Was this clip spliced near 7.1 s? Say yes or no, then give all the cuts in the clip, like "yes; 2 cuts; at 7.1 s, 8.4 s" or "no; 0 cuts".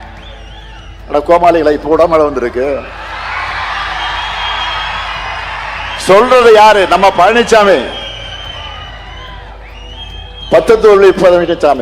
no; 0 cuts